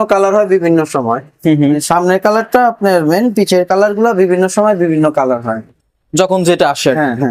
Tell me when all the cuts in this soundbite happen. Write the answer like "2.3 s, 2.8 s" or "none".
none